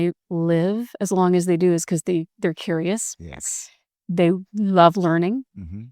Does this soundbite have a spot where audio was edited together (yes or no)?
no